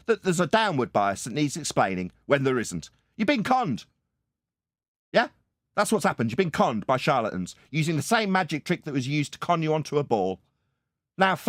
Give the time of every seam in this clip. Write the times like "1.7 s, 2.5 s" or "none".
none

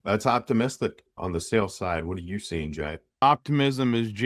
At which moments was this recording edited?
1.1 s, 3.2 s

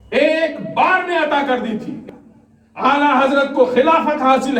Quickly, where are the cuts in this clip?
2.0 s

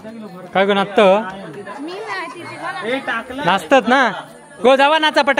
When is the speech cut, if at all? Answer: none

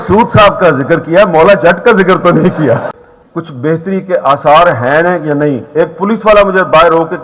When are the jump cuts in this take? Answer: 2.9 s

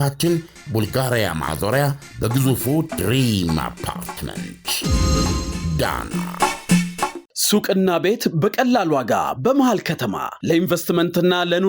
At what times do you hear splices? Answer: 7.2 s

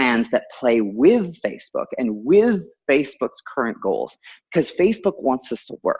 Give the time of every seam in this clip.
none

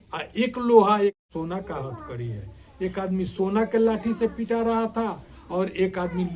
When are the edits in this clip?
1.2 s

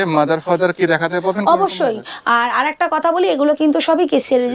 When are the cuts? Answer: none

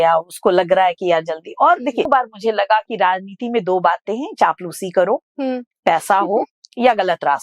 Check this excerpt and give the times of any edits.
2.1 s

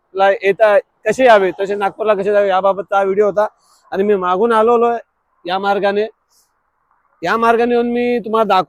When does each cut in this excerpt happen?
none

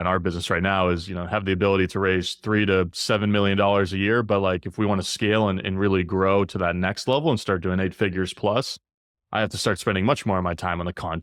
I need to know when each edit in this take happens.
none

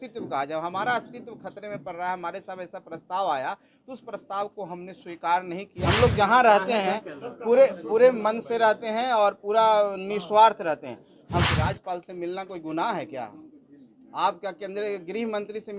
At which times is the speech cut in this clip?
5.8 s, 11.4 s

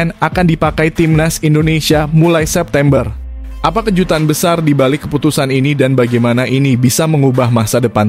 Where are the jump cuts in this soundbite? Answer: none

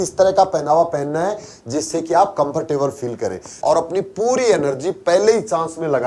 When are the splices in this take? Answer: 3.5 s

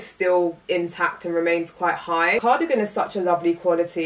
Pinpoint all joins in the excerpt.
2.4 s

